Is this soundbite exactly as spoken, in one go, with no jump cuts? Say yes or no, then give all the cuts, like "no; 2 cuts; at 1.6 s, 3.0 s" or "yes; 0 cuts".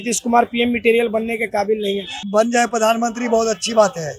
no; 1 cut; at 2.2 s